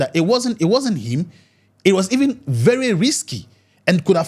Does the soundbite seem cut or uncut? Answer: uncut